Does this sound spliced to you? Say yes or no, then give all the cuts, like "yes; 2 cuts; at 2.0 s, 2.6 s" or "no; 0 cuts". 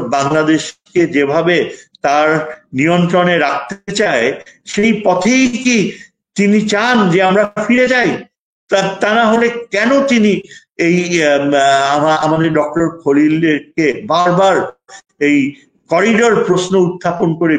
no; 0 cuts